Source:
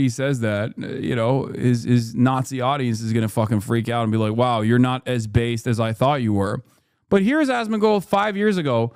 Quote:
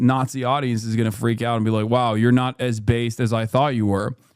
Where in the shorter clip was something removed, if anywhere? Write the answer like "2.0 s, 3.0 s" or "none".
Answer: 1.1 s